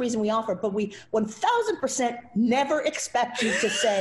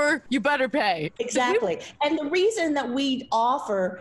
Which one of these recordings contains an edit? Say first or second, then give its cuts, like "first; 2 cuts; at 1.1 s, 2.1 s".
second; 1 cut; at 1.1 s